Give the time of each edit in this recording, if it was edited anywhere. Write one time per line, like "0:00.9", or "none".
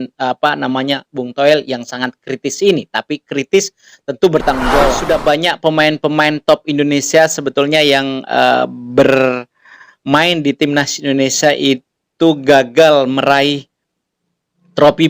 0:04.8